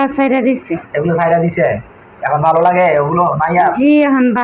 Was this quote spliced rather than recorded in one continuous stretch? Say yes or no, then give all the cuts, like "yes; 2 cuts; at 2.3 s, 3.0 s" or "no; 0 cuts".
no; 0 cuts